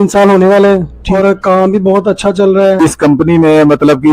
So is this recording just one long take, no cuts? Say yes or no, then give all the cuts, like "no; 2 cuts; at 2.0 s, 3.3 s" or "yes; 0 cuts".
no; 2 cuts; at 1.0 s, 2.8 s